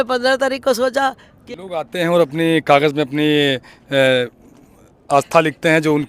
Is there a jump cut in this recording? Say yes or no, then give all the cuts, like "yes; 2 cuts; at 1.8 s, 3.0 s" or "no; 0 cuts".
yes; 1 cut; at 1.3 s